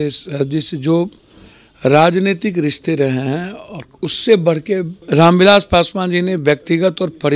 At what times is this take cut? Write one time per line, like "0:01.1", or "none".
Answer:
0:05.0

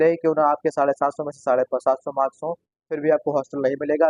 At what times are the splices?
none

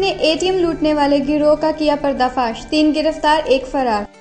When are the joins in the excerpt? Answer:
none

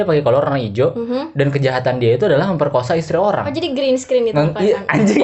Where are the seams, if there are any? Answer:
none

